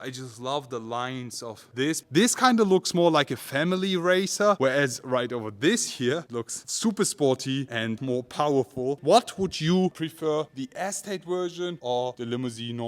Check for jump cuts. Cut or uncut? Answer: cut